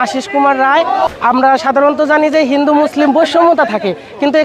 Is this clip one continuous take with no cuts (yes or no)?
no